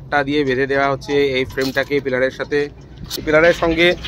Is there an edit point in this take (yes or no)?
yes